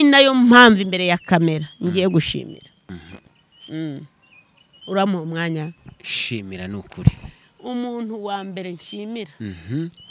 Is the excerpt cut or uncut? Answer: uncut